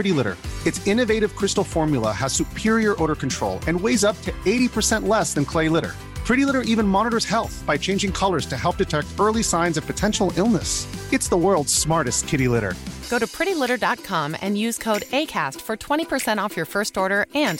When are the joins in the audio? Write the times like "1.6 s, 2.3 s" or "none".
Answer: none